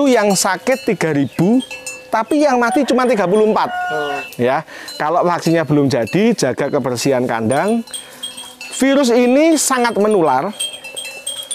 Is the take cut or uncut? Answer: cut